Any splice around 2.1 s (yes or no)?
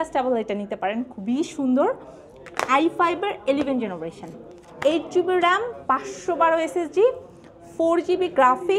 no